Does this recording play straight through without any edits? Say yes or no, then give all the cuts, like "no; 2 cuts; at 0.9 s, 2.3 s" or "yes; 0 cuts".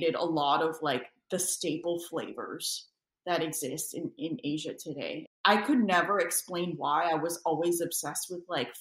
no; 1 cut; at 5.2 s